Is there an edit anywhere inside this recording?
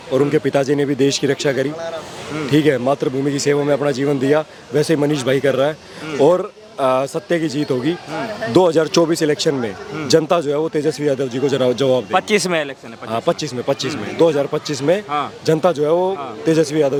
no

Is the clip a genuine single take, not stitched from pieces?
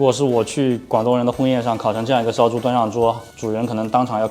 yes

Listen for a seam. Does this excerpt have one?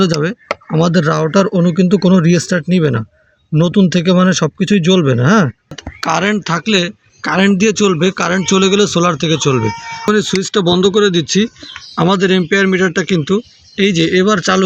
yes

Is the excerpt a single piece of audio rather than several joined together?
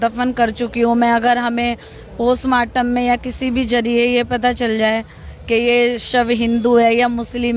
yes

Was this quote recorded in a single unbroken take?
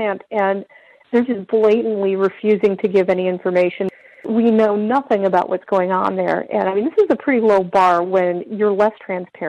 no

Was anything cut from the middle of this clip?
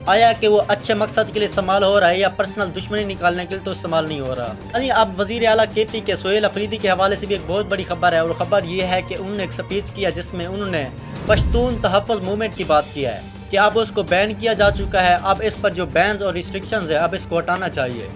no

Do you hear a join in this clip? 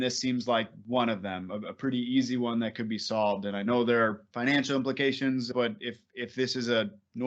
yes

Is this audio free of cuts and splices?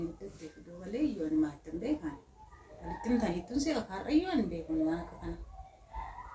yes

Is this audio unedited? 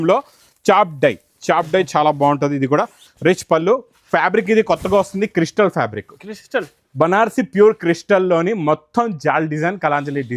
yes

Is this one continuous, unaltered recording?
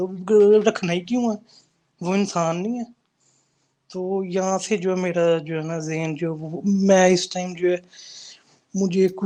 yes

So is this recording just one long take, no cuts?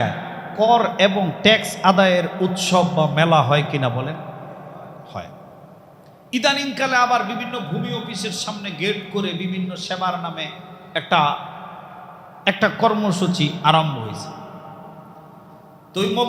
yes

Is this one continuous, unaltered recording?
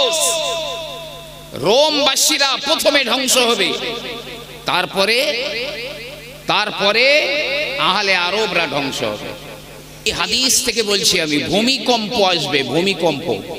no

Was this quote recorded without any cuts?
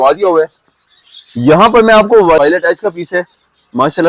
no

